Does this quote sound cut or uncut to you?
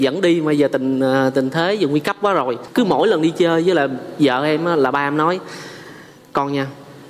cut